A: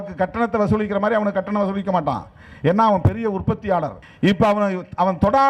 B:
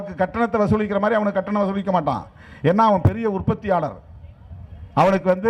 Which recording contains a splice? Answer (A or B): A